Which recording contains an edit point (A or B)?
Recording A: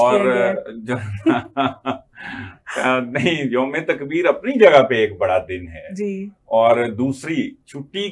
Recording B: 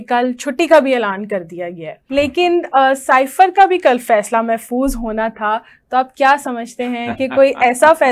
B